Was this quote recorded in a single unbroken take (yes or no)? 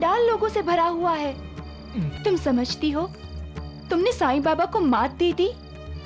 no